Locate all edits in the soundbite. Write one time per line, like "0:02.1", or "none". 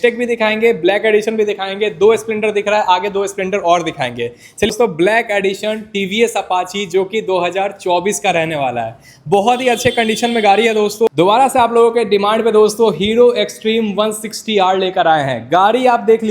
0:04.7
0:11.1